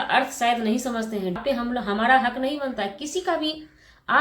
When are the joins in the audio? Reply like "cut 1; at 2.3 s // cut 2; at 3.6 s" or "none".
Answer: cut 1; at 1.4 s